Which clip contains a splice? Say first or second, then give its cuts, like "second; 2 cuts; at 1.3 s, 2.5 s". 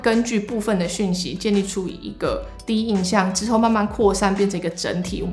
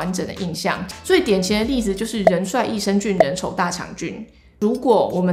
second; 2 cuts; at 0.9 s, 4.4 s